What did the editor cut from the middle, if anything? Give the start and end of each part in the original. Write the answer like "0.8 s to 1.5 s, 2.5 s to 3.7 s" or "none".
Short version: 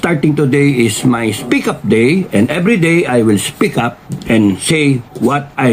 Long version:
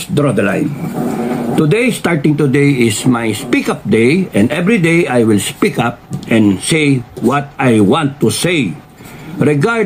none